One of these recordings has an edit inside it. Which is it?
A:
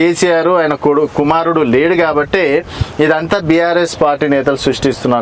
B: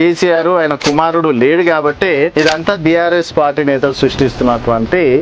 B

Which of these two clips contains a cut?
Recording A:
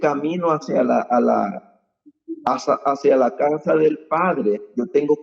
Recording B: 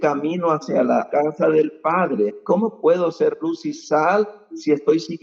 B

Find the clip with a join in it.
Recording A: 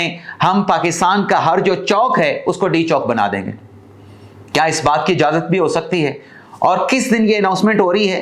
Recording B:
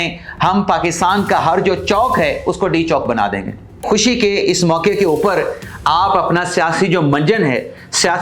B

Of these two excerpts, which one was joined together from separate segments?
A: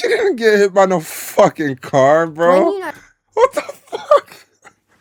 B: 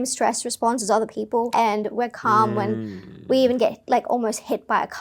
B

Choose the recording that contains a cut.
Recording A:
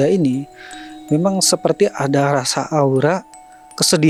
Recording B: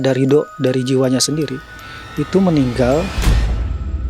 B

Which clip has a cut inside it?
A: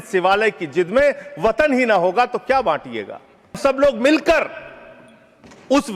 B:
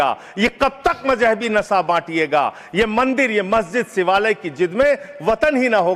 A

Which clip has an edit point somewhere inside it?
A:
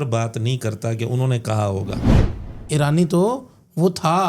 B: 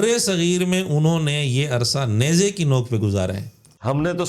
A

